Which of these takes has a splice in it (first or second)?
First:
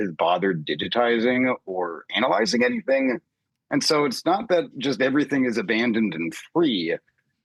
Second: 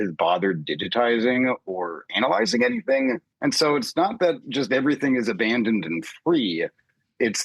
second